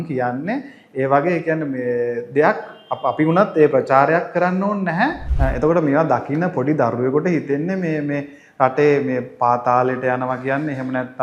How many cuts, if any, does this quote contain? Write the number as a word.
one